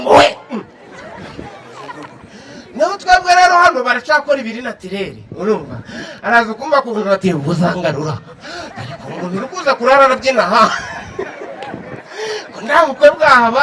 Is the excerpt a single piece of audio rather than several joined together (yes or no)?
yes